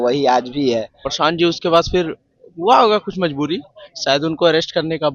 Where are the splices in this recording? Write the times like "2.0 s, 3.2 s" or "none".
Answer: 1.0 s